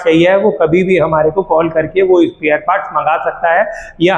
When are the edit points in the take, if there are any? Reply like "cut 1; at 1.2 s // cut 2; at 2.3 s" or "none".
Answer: none